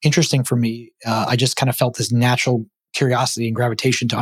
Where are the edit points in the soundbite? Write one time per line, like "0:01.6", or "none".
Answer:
none